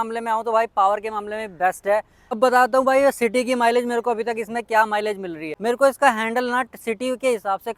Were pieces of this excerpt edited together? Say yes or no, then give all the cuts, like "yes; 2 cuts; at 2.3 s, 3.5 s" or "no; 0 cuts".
yes; 2 cuts; at 2.4 s, 5.4 s